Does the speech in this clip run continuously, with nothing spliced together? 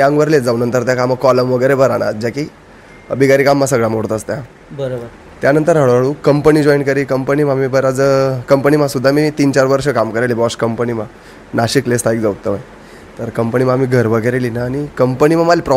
yes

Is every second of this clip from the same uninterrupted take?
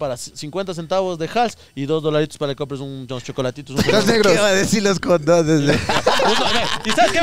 yes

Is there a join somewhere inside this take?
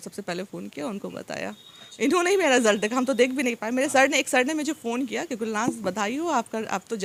no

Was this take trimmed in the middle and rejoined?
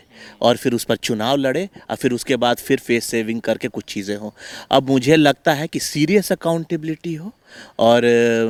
no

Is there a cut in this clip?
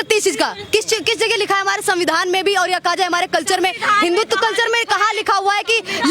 no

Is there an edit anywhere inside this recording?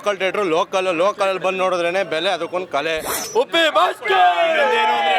yes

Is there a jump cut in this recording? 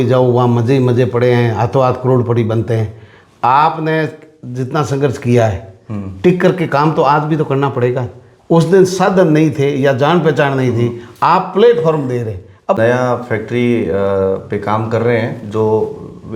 yes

